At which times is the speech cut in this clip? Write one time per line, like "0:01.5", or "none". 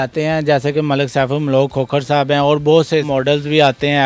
0:03.1